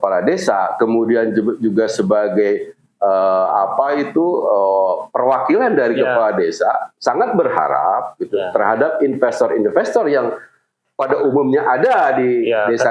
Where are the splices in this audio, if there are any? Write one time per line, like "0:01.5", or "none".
none